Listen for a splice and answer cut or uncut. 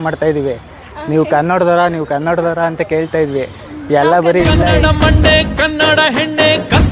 uncut